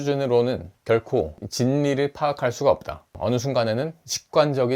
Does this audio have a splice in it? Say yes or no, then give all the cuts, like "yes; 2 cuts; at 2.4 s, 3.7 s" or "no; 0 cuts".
yes; 1 cut; at 3.2 s